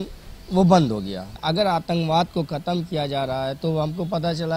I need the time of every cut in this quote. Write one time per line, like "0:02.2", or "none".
0:01.4